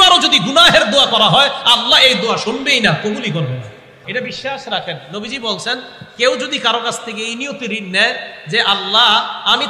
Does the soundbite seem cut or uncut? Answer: cut